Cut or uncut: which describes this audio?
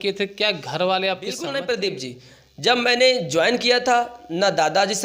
cut